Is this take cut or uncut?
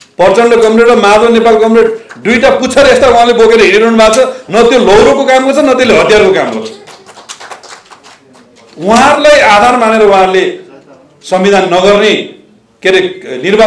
uncut